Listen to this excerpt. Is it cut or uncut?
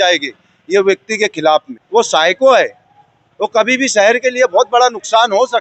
cut